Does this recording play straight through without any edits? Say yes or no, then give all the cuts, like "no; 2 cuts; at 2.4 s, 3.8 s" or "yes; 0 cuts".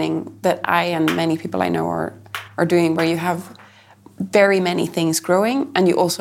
yes; 0 cuts